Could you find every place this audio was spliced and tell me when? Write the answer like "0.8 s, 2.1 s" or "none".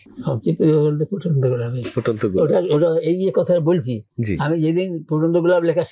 none